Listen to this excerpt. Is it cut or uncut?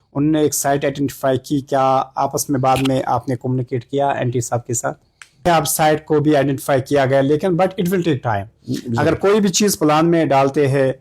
cut